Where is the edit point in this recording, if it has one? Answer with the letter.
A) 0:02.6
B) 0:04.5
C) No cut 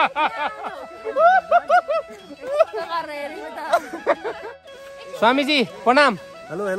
B